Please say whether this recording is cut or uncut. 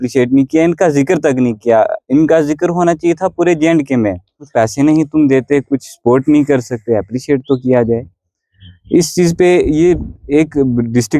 cut